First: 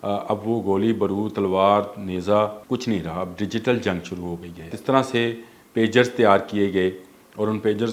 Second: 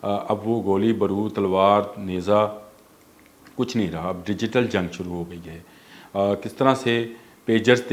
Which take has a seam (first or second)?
first